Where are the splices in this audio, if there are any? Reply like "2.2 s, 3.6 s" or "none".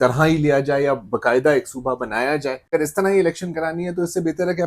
2.6 s

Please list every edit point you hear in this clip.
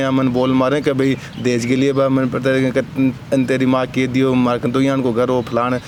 none

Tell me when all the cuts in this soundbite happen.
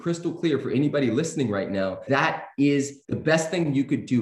2.0 s, 3.0 s

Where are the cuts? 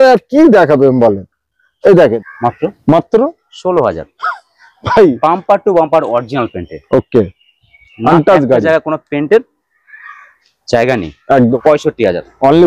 2.2 s, 11.6 s

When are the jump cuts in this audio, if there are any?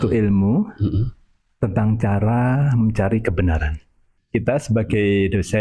4.0 s

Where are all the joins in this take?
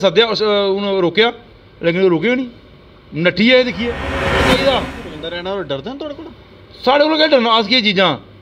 4.5 s

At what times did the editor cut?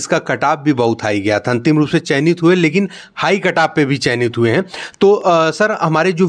none

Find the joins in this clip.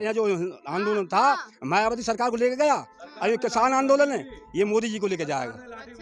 none

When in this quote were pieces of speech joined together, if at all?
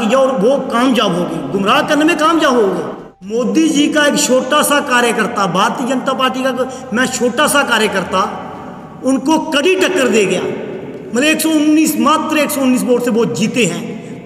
3.2 s

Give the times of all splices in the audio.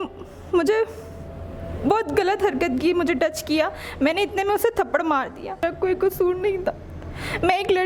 5.6 s

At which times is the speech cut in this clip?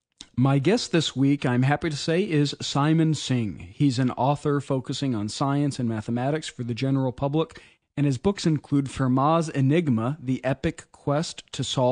1.0 s

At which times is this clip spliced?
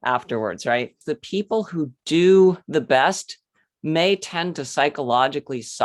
1.1 s, 2.6 s

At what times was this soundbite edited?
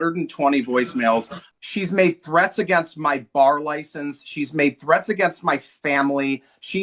1.4 s

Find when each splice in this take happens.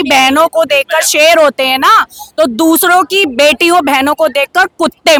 none

